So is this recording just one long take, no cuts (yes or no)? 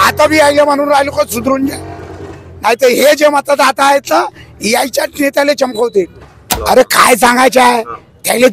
no